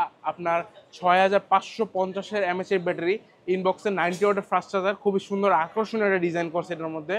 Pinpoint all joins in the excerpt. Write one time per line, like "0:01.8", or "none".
none